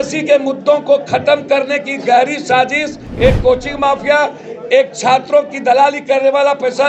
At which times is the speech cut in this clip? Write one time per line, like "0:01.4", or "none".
0:03.0